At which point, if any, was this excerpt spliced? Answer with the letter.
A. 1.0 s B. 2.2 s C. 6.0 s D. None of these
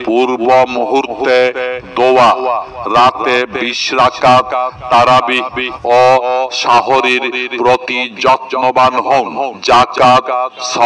D